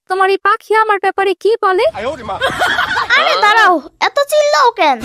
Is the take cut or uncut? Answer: uncut